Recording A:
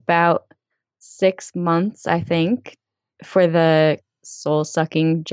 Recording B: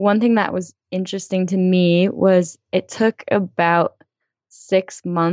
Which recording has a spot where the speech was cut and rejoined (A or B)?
A